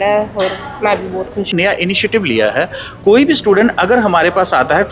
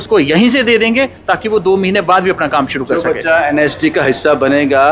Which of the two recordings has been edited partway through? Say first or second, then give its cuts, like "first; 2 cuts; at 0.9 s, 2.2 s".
first; 1 cut; at 1.5 s